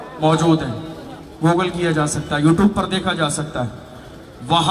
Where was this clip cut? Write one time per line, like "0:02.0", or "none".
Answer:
none